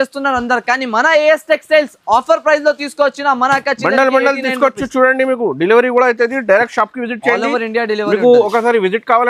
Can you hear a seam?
no; 0 cuts

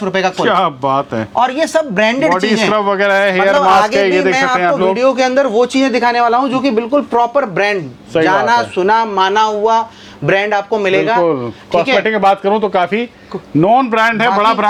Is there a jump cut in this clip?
no; 0 cuts

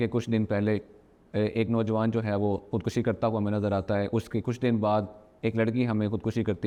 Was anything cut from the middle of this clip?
no; 0 cuts

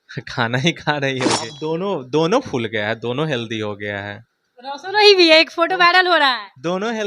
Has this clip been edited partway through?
yes; 1 cut; at 1.5 s

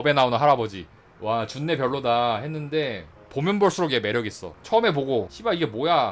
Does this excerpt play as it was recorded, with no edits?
yes; 0 cuts

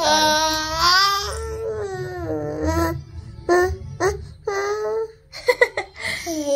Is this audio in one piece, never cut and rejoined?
yes; 0 cuts

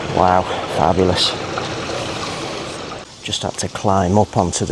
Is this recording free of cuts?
no; 1 cut; at 3.0 s

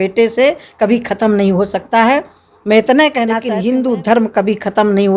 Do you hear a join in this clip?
yes; 1 cut; at 3.4 s

